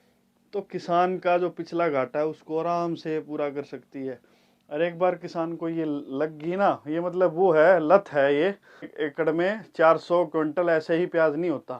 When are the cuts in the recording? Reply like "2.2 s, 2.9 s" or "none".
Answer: 8.7 s